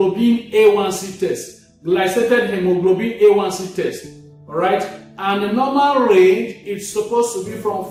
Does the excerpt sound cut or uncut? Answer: uncut